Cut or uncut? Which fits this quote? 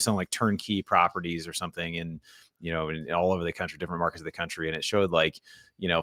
uncut